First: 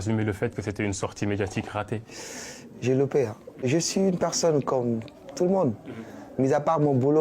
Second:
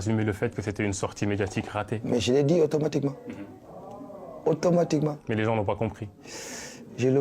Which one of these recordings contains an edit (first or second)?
first